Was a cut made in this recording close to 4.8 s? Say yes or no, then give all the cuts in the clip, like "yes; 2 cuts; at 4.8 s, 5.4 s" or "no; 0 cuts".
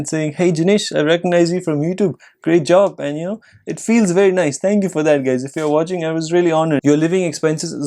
no; 1 cut; at 6.8 s